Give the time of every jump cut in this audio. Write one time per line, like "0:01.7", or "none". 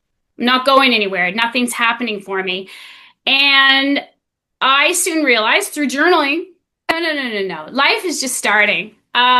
0:06.9